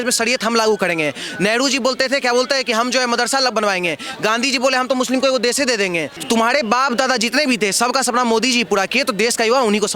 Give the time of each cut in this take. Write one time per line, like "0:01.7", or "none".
0:06.1